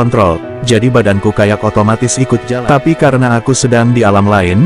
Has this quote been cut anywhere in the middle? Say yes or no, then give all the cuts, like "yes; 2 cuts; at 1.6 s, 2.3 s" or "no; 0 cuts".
yes; 1 cut; at 2.5 s